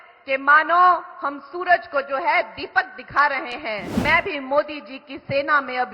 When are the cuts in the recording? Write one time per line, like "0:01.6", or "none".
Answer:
0:04.0